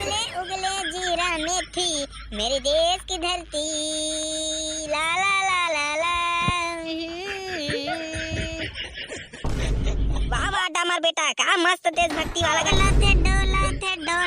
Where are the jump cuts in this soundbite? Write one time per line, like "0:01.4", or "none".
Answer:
0:12.7